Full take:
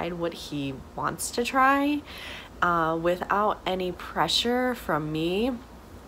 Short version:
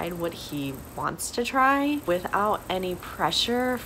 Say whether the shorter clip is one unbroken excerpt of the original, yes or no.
no